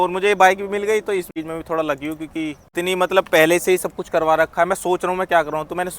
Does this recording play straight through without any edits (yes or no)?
no